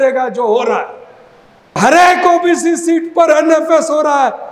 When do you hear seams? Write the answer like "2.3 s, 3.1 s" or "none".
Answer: 1.8 s